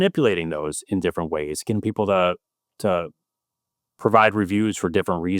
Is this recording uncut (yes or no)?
yes